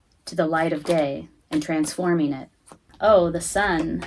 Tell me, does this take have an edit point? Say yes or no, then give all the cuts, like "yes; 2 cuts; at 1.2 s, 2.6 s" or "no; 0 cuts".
yes; 1 cut; at 2.8 s